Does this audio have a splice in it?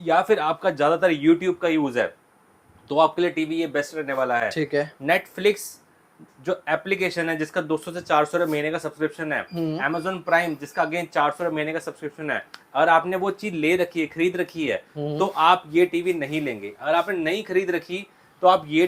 no; 0 cuts

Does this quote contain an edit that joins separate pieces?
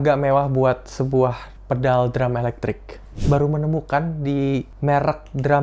yes; 2 cuts; at 3.1 s, 4.7 s

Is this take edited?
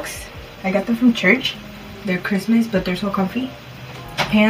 no; 0 cuts

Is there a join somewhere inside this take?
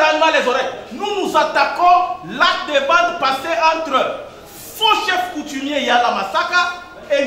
no; 0 cuts

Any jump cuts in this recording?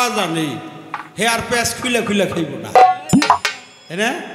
no; 0 cuts

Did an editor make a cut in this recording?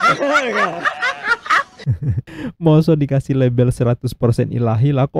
no; 0 cuts

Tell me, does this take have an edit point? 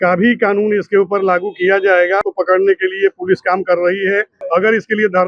yes; 2 cuts; at 2.2 s, 4.3 s

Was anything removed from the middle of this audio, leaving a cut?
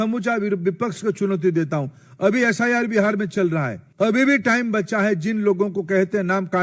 yes; 1 cut; at 3.8 s

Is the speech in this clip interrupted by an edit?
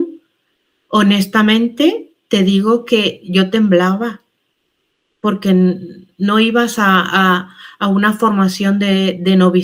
no; 0 cuts

